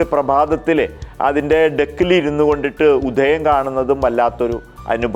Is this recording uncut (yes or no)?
yes